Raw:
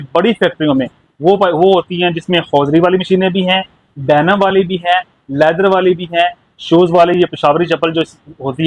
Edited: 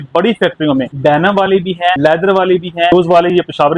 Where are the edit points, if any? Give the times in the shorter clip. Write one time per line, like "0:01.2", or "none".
0:00.9
0:02.0
0:02.9